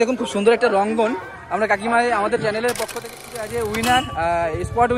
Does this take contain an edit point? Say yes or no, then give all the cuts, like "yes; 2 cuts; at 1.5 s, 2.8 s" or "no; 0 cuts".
yes; 1 cut; at 3.2 s